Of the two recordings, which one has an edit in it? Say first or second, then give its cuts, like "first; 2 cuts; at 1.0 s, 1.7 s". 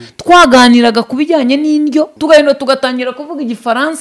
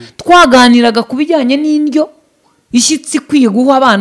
first; 1 cut; at 2.1 s